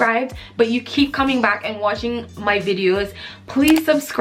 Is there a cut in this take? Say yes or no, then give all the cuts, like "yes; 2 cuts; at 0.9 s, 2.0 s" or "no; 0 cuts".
no; 0 cuts